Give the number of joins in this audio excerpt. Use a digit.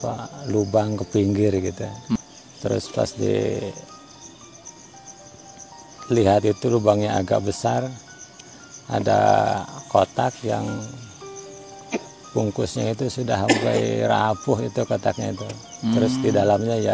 1